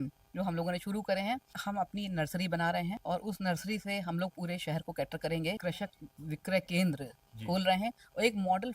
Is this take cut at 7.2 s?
no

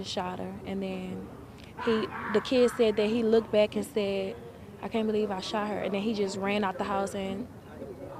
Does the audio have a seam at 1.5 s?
no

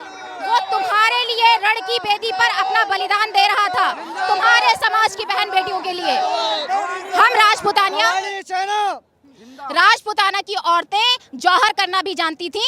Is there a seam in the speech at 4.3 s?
no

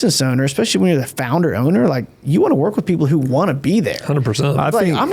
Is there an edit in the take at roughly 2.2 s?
no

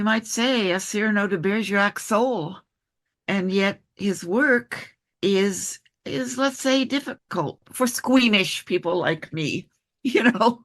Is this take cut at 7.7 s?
yes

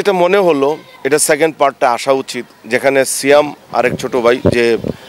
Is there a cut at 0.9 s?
yes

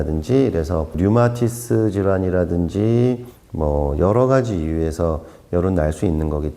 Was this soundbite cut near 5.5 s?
no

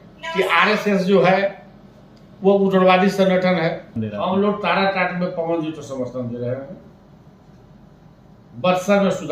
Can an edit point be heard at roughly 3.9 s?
yes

